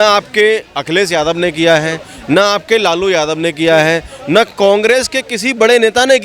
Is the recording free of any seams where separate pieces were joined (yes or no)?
yes